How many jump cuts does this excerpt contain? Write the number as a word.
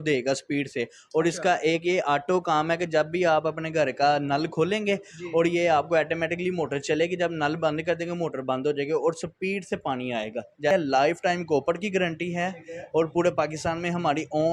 one